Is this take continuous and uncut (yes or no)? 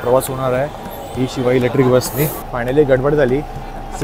no